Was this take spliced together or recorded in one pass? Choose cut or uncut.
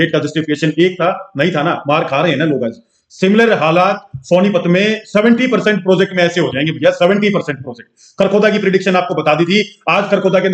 uncut